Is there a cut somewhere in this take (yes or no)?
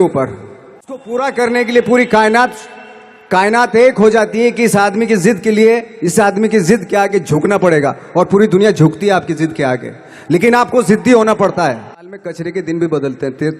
yes